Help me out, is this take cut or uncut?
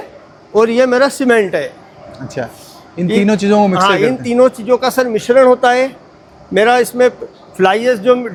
uncut